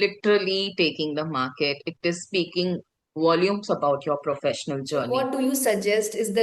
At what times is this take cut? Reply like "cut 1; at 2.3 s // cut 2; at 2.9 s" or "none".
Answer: cut 1; at 5.1 s